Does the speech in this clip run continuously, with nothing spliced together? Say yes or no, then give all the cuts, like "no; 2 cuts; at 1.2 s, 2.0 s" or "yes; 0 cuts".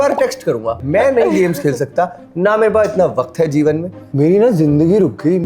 no; 2 cuts; at 0.8 s, 4.0 s